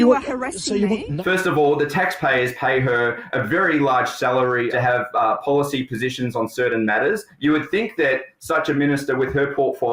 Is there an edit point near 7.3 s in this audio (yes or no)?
yes